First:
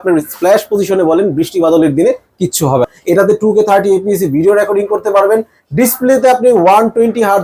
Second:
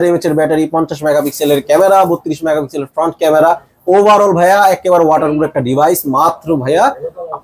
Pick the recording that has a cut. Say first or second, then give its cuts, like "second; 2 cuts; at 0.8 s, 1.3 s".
first; 1 cut; at 3.0 s